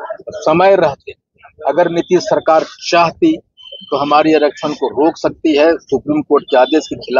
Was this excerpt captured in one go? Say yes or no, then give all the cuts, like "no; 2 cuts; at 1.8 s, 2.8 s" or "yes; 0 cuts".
yes; 0 cuts